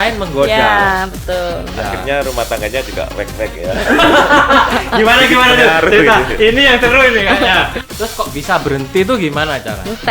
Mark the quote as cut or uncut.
cut